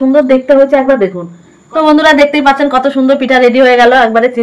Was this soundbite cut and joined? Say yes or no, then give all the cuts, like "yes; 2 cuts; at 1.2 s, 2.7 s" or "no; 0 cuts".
yes; 1 cut; at 1.7 s